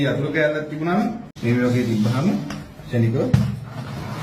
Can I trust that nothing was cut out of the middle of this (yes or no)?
no